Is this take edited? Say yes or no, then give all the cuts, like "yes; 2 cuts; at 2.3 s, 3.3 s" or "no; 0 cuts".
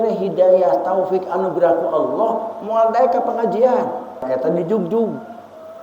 yes; 1 cut; at 4.3 s